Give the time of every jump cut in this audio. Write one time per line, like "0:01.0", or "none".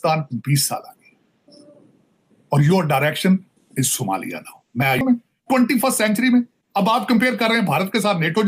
0:05.0